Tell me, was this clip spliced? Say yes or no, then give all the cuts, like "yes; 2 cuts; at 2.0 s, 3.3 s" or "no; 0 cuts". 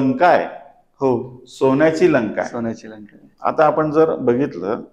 no; 0 cuts